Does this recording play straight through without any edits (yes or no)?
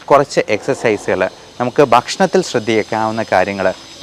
yes